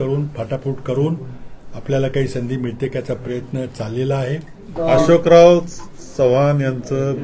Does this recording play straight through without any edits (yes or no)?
no